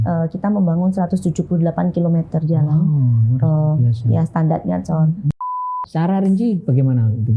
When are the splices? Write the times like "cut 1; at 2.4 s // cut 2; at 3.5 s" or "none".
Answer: cut 1; at 5.8 s